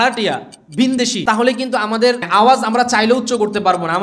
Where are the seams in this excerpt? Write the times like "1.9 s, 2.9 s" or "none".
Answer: 1.2 s, 2.2 s